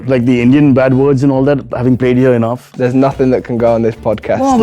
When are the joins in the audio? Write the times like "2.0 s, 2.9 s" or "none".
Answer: 2.7 s